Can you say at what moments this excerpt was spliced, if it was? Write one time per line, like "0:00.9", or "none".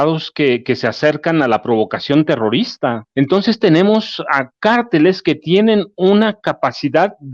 0:03.0